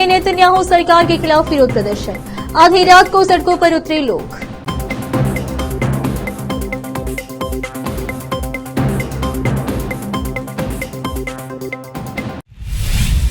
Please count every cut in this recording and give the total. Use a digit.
1